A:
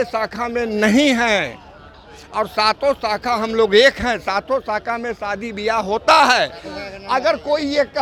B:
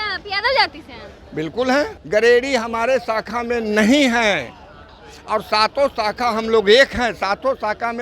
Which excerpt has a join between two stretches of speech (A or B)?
B